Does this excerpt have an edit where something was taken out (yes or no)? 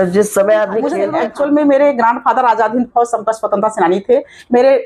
yes